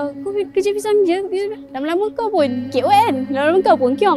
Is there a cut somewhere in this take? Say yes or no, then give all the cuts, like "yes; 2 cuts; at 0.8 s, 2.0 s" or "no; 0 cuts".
no; 0 cuts